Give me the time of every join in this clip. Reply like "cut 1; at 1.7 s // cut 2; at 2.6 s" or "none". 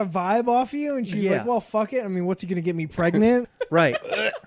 cut 1; at 3.5 s